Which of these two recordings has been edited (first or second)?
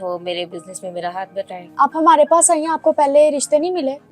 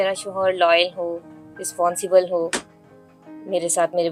first